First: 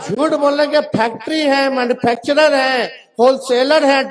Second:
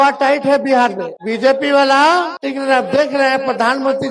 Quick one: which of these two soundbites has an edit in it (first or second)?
second